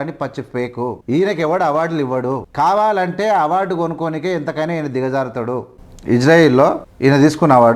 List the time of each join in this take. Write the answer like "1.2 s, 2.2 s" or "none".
1.0 s, 2.5 s, 5.8 s, 6.9 s